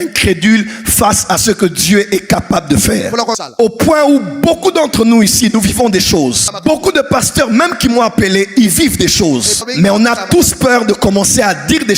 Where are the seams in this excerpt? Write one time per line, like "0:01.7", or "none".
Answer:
0:03.4
0:06.5
0:09.6